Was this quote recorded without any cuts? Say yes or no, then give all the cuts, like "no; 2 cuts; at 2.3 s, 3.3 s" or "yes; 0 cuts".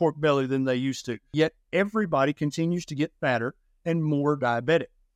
no; 1 cut; at 1.3 s